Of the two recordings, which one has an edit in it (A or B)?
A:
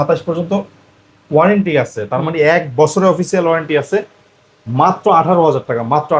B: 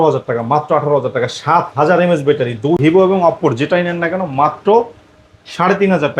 B